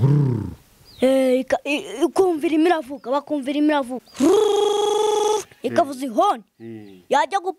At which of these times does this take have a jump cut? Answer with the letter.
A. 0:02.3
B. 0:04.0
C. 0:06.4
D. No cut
B